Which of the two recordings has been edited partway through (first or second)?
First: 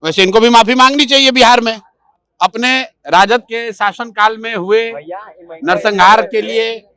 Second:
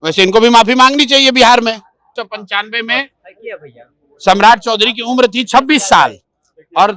second